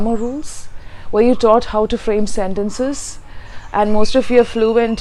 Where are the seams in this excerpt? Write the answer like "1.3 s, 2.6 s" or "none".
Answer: none